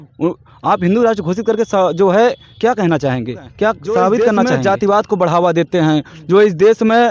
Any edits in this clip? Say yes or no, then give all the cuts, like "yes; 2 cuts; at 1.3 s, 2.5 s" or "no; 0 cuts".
yes; 1 cut; at 4.3 s